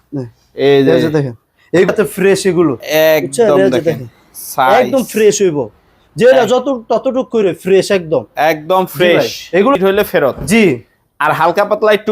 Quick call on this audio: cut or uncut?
cut